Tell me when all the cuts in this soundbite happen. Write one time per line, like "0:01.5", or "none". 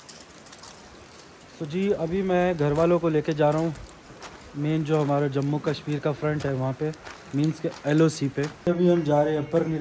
0:08.7